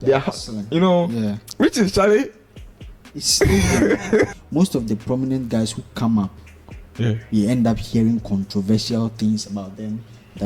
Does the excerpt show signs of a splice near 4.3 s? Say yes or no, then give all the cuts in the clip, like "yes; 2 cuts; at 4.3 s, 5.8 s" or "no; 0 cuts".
yes; 1 cut; at 4.3 s